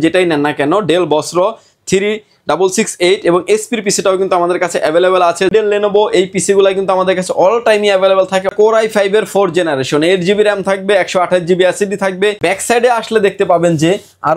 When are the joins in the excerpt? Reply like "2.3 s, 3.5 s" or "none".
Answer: 5.5 s, 8.5 s, 12.4 s